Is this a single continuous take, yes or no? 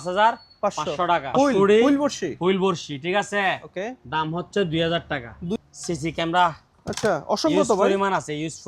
no